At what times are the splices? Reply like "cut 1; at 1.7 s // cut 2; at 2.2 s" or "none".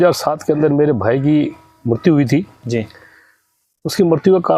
none